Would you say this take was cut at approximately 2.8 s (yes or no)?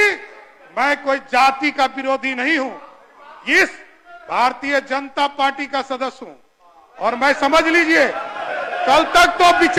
no